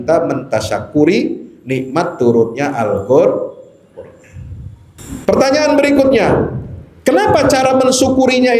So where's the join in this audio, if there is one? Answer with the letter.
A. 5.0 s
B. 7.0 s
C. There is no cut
A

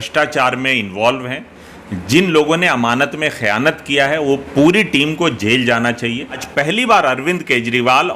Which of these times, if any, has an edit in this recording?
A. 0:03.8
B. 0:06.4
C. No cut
B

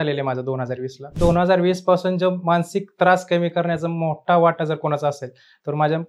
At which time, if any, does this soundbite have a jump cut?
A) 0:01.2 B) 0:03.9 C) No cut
A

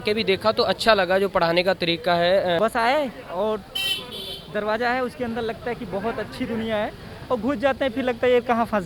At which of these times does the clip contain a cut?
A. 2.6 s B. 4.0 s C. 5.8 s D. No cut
A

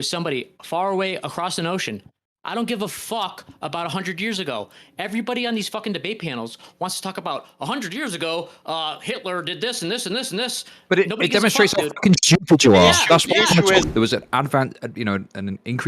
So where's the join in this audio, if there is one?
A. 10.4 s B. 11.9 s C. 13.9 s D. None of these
C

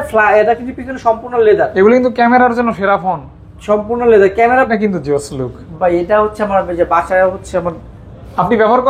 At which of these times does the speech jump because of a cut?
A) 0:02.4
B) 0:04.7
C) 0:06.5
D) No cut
B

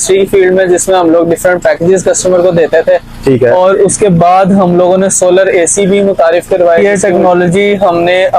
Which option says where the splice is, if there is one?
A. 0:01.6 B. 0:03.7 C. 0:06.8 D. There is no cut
C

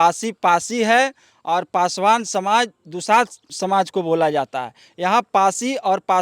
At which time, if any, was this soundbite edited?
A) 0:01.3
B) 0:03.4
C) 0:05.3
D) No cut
B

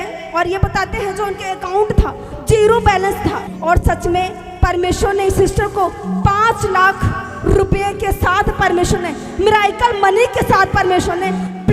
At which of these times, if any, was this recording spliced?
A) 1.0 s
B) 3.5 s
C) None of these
B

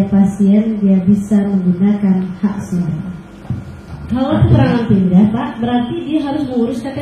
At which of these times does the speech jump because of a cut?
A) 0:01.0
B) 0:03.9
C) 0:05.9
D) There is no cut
B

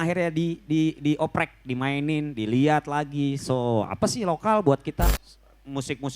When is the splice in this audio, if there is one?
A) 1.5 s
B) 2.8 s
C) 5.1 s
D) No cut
C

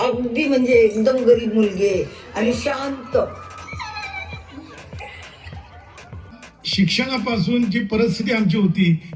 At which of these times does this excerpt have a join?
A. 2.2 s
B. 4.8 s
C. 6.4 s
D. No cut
C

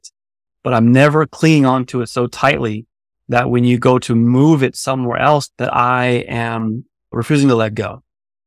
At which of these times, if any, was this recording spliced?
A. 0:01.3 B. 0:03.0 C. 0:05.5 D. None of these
C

